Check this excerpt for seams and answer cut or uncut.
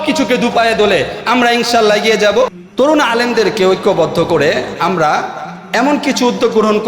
cut